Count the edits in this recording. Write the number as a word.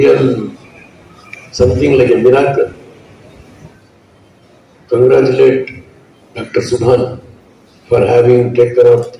one